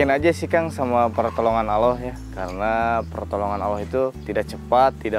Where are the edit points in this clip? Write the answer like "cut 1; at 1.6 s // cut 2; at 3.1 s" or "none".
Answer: none